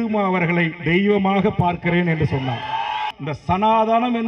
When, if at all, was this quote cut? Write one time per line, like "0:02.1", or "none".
0:03.1